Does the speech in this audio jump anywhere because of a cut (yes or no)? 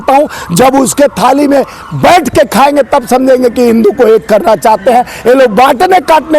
no